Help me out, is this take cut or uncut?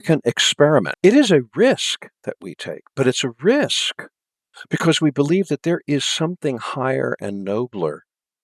cut